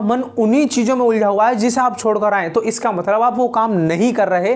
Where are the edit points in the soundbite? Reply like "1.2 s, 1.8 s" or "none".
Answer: none

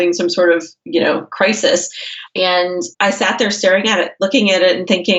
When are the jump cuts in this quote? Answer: none

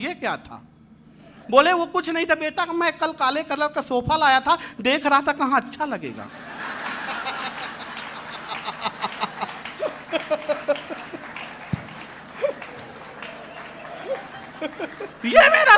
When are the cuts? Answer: none

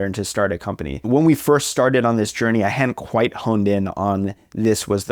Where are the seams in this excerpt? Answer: 1.1 s

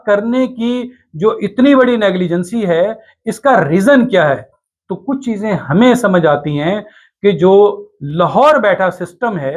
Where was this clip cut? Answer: none

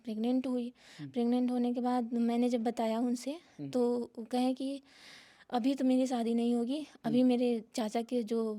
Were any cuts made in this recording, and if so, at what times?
none

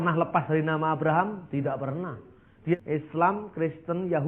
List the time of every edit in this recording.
2.8 s

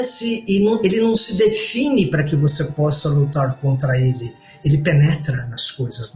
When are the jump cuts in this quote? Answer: 4.5 s

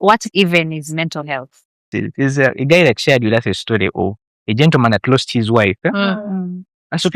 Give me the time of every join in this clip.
1.9 s

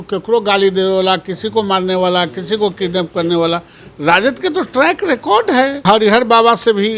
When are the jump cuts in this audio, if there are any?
5.8 s

